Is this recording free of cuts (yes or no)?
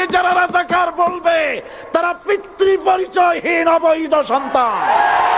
yes